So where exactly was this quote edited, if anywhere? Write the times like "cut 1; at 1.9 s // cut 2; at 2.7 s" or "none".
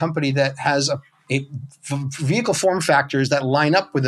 cut 1; at 1.1 s